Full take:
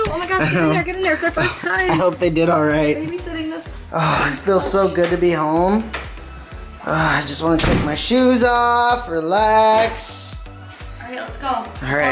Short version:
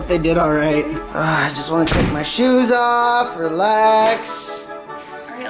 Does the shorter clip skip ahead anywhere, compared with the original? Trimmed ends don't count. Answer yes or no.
yes